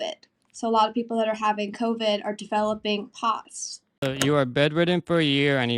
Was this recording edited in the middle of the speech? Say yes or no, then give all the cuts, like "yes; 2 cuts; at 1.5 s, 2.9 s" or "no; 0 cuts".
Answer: yes; 1 cut; at 3.9 s